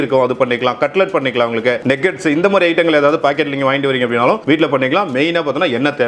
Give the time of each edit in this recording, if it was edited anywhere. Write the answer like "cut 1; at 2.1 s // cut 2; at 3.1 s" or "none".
none

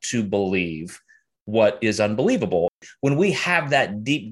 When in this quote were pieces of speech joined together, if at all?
cut 1; at 2.7 s

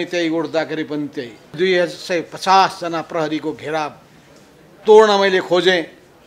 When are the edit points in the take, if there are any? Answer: cut 1; at 1.5 s

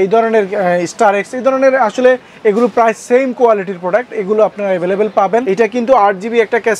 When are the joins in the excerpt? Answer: cut 1; at 5.4 s

